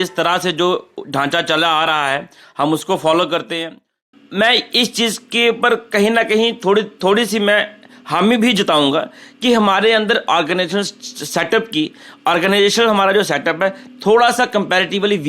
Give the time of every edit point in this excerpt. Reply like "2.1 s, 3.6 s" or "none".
4.1 s